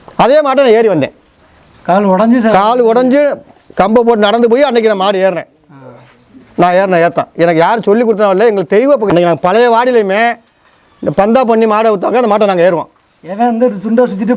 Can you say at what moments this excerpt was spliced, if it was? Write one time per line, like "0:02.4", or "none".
0:09.1